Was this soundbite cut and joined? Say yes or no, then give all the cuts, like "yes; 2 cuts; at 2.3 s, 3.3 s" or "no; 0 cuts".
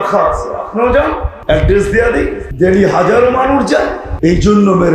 yes; 3 cuts; at 1.3 s, 2.4 s, 4.0 s